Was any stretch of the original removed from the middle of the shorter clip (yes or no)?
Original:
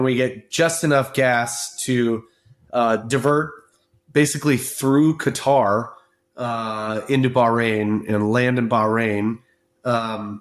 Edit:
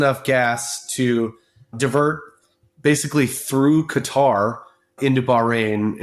yes